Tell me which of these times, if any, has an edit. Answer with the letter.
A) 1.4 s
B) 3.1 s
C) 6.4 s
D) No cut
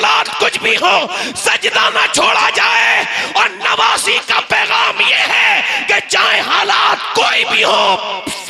D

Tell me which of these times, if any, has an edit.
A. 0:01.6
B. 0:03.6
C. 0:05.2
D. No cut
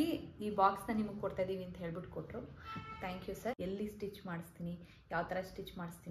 B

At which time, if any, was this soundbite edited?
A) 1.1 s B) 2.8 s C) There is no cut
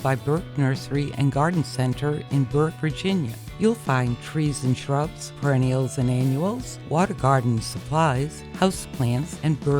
B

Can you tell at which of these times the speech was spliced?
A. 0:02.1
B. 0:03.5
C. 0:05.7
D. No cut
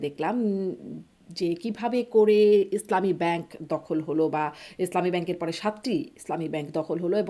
D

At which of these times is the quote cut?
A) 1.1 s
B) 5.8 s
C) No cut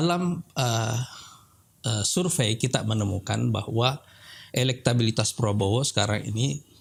C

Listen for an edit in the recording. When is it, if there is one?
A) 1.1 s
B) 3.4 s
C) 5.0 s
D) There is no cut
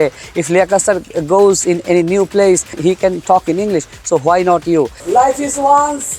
C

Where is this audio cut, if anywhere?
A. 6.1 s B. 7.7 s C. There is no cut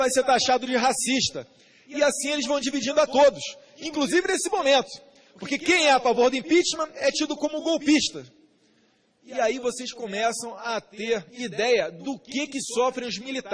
B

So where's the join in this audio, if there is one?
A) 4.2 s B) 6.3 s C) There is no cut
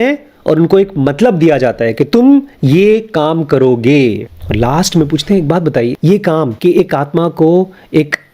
B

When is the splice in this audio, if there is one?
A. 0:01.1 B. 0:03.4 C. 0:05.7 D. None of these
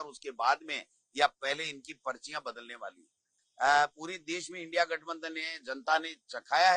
B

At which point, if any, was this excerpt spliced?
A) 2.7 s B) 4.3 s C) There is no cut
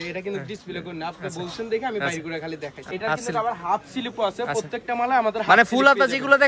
A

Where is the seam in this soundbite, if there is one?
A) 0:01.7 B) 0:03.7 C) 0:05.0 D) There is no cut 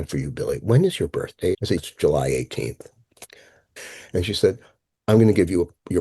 A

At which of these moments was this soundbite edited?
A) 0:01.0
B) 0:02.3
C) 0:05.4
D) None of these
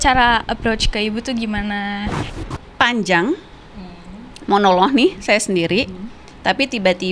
B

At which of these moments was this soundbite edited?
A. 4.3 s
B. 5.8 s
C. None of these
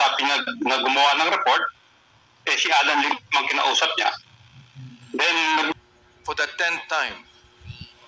B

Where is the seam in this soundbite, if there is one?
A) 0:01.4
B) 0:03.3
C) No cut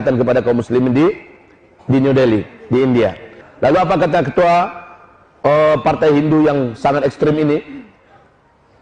B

